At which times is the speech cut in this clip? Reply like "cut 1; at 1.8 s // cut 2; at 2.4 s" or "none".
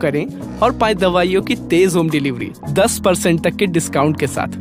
none